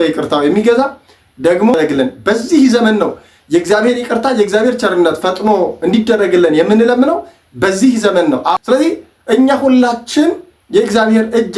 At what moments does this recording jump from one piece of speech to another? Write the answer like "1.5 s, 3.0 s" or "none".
1.7 s, 8.6 s